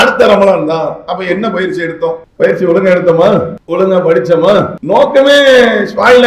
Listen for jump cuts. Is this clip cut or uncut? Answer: cut